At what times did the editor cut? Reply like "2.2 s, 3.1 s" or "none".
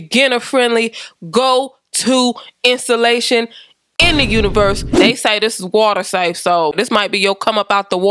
5.2 s